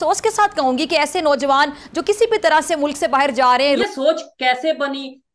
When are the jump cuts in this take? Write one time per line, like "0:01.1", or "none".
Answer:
0:03.8